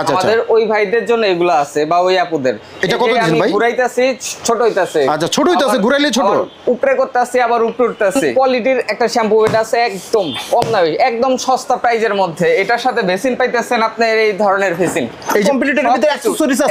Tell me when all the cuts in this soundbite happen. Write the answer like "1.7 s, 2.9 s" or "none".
8.3 s, 15.4 s

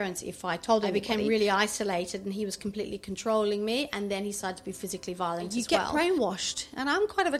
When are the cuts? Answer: 0.9 s, 5.5 s

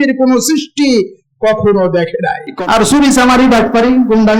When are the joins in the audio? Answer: 2.5 s

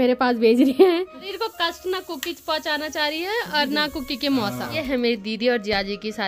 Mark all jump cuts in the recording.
0.9 s, 4.8 s

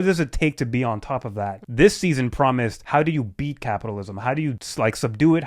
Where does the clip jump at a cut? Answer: 1.6 s, 2.8 s, 4.6 s

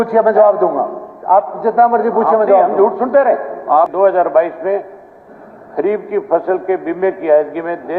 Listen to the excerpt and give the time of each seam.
3.9 s

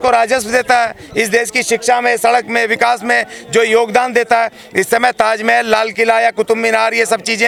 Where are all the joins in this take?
none

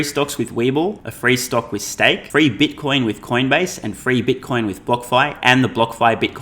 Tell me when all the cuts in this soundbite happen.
1.1 s, 2.2 s

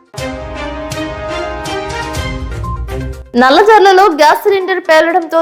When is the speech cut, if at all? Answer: 3.1 s

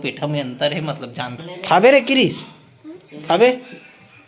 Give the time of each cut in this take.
1.4 s

